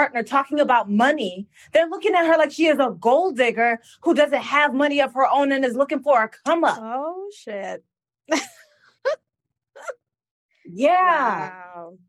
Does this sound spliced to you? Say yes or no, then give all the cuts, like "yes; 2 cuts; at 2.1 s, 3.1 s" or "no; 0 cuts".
no; 0 cuts